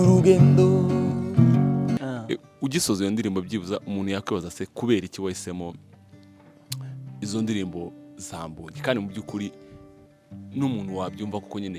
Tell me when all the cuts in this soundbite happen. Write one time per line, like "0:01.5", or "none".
0:02.0

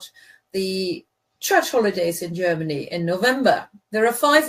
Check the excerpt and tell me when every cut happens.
0:02.8

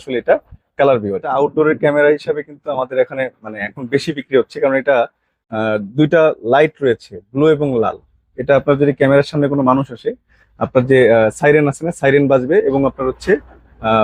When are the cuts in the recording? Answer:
0:01.3

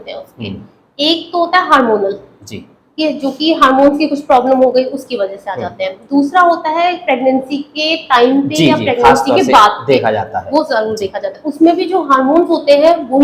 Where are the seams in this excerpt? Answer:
none

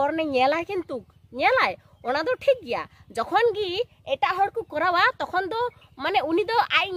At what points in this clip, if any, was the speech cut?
0:02.8

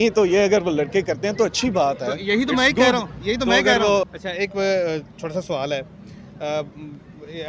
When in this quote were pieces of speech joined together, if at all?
0:04.1

